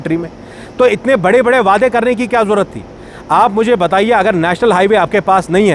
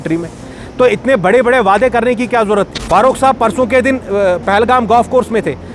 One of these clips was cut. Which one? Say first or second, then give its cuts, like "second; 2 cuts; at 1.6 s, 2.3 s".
second; 1 cut; at 2.8 s